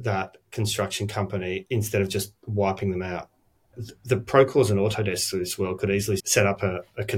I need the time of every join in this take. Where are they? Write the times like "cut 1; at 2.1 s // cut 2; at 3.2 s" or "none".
cut 1; at 1.6 s // cut 2; at 3.7 s